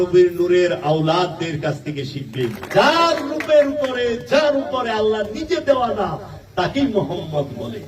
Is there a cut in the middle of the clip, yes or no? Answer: yes